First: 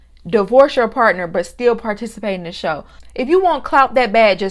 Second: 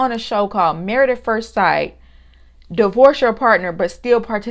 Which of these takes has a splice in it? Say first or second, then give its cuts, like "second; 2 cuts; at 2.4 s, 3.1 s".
first; 1 cut; at 3.0 s